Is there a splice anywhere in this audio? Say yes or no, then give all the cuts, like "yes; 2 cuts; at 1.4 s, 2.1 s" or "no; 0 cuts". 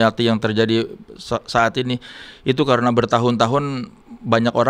no; 0 cuts